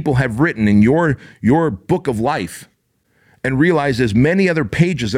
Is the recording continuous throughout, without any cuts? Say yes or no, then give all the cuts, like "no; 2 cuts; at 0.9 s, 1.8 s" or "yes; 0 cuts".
yes; 0 cuts